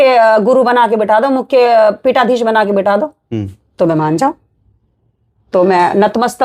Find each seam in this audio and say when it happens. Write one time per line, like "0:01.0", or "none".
none